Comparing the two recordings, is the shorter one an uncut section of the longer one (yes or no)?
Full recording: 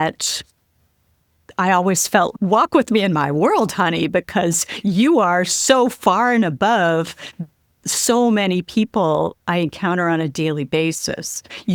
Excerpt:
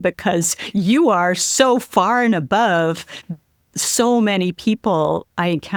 yes